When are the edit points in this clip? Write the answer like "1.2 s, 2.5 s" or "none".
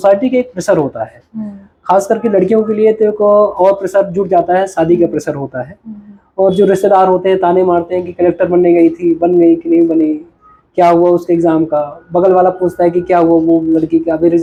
none